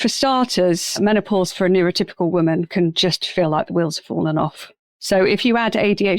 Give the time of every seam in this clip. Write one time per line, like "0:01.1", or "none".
0:01.0